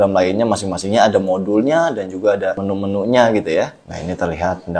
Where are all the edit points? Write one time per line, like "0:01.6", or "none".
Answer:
0:02.6
0:03.9